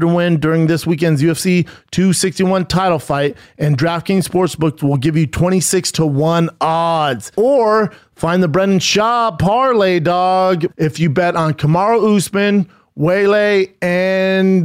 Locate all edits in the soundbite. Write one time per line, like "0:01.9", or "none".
0:07.2
0:10.7